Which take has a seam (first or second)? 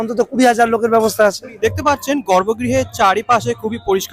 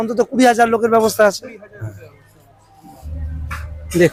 first